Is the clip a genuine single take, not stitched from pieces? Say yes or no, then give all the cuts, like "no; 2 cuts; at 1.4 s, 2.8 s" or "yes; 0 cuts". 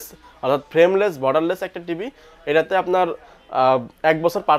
yes; 0 cuts